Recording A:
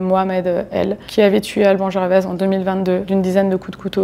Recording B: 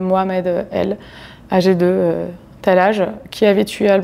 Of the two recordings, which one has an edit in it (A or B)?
A